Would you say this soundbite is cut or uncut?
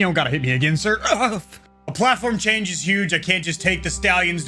uncut